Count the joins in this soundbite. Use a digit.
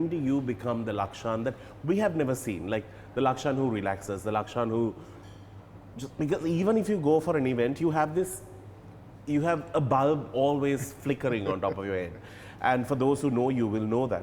0